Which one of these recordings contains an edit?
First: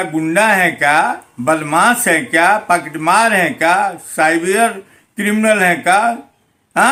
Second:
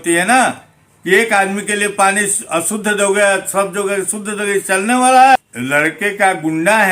second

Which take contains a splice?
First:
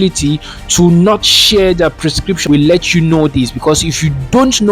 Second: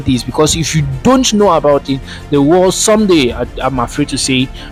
first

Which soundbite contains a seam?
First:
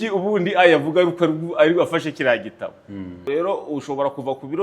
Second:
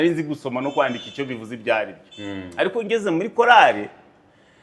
first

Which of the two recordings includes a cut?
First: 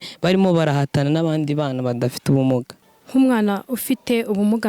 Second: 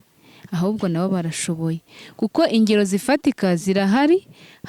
first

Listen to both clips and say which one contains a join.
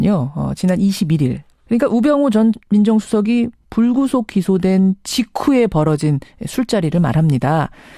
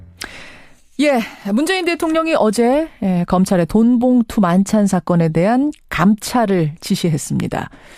first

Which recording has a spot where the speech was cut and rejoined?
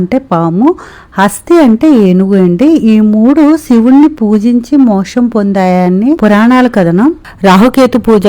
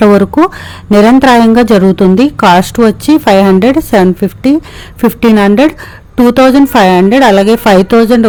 first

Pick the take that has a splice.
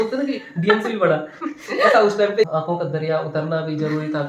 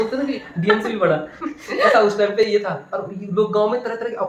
first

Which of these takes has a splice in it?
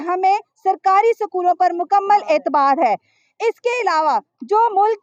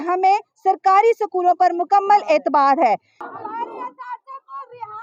second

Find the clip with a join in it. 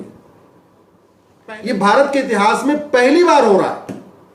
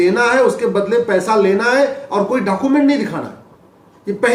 first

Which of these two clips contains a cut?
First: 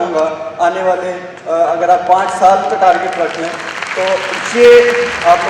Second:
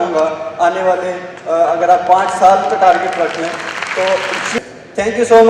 second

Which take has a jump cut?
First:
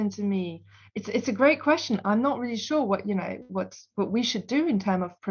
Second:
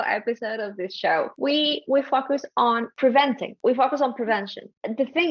second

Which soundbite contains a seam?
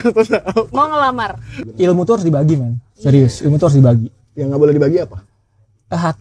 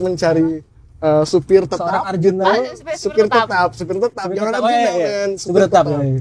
first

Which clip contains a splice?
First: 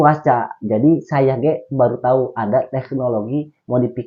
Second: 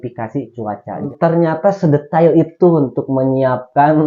second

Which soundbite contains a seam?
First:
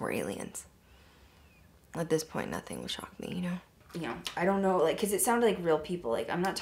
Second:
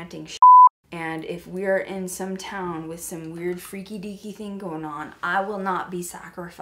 first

